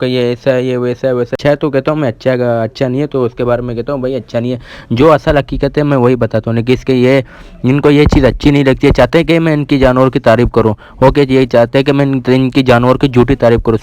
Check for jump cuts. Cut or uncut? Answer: cut